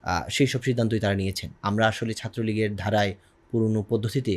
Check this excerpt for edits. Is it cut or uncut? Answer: cut